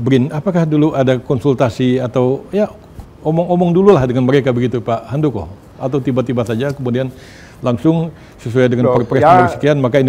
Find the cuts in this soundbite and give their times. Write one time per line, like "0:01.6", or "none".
none